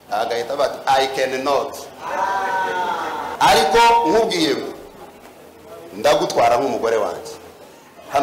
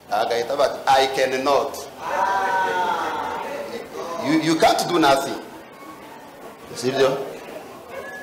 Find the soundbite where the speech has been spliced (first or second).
first